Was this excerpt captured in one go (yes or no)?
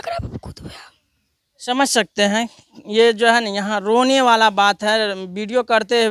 yes